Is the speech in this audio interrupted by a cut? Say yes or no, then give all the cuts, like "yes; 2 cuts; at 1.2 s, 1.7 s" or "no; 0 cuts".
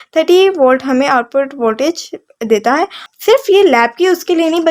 yes; 1 cut; at 3.1 s